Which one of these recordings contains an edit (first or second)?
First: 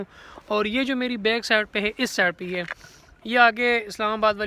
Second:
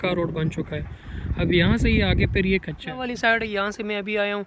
second